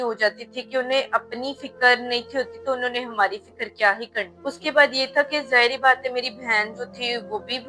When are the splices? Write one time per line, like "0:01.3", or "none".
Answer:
0:04.3